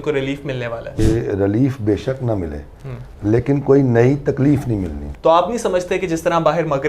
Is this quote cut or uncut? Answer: cut